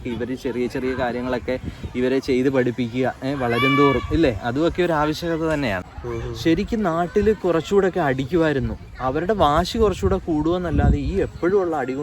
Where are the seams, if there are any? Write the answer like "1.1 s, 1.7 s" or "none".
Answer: 5.9 s